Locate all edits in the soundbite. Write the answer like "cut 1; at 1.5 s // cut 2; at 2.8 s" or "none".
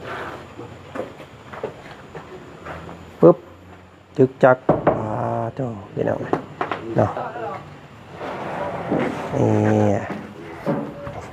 none